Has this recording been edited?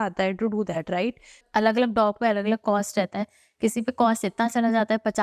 yes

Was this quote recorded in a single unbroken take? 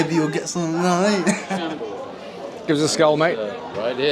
no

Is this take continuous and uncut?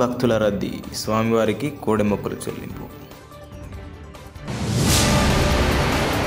yes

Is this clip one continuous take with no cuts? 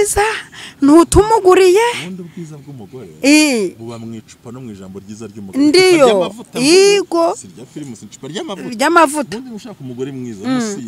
yes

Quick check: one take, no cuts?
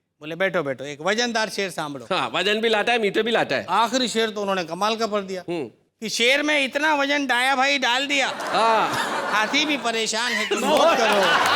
yes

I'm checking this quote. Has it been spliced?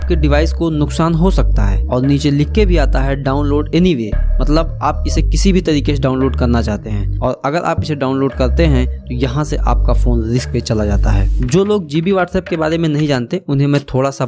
no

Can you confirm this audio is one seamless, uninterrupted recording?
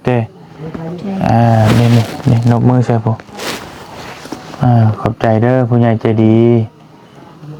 yes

